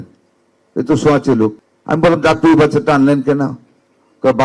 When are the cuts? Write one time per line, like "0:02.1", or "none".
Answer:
0:01.7